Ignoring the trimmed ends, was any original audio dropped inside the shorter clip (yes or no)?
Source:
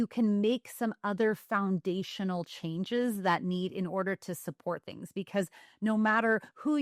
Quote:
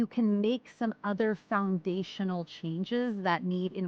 no